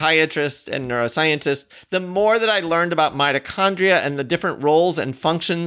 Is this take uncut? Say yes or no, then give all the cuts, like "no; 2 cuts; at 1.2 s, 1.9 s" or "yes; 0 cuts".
yes; 0 cuts